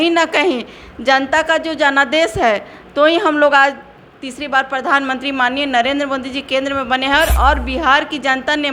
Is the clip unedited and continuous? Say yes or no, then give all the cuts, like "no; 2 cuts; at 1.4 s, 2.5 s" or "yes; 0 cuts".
yes; 0 cuts